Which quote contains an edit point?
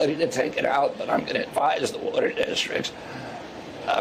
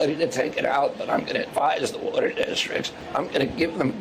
second; 1 cut; at 3.0 s

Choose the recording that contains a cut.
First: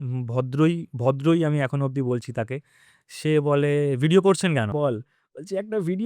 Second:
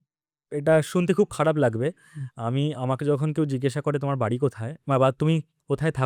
first; 1 cut; at 4.7 s

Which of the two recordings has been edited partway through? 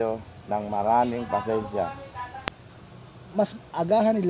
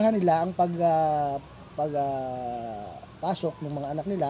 first; 1 cut; at 2.5 s

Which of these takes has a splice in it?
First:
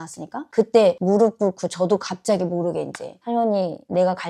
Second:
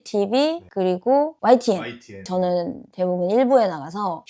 second; 1 cut; at 2.3 s

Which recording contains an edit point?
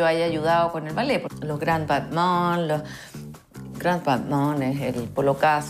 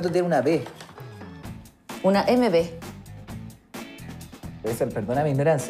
first; 1 cut; at 1.3 s

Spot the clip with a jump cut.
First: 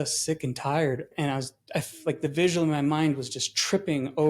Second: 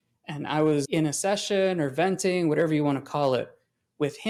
first; 1 cut; at 1.1 s

